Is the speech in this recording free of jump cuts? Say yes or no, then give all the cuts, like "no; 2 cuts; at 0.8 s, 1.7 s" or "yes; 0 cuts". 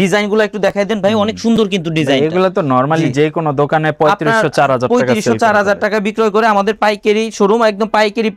yes; 0 cuts